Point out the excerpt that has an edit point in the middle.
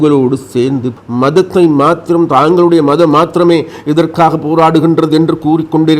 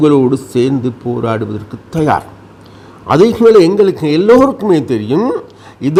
first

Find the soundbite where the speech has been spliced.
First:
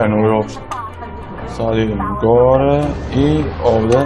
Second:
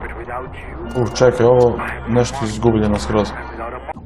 second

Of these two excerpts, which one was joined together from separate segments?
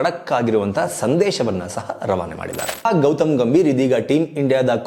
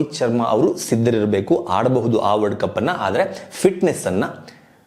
first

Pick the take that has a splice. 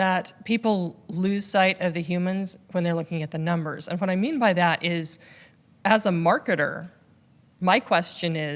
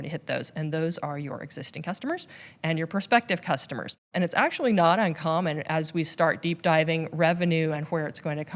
second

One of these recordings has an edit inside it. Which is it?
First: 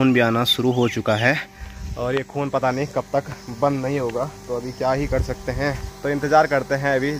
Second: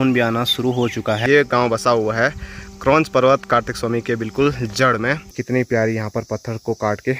second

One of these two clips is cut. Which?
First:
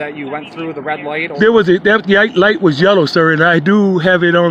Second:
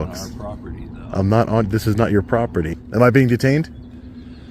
second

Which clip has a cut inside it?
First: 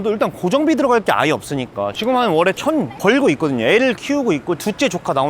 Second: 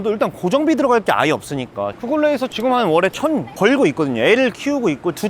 first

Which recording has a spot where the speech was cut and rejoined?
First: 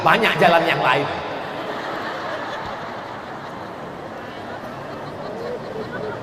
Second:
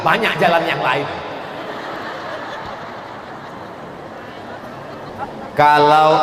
second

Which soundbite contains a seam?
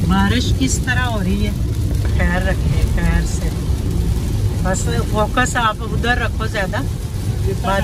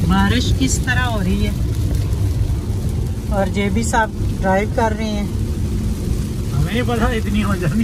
first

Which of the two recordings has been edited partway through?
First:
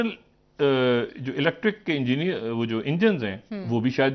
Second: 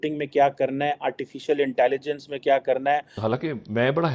second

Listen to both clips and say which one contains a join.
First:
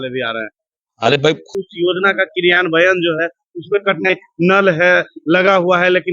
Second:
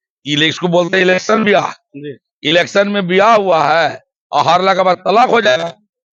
first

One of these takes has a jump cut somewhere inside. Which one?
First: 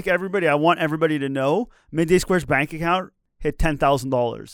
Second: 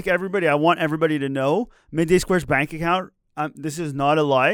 first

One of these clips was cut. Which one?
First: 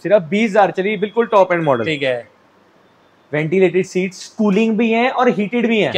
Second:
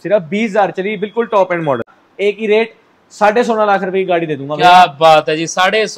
second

